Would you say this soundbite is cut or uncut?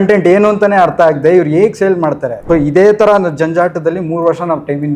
cut